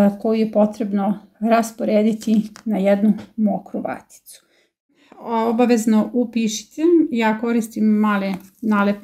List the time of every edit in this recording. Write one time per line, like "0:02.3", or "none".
0:04.9